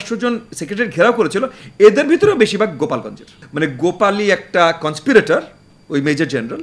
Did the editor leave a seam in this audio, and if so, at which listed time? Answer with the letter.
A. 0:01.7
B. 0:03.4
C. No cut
B